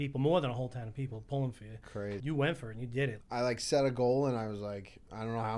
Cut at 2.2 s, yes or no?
yes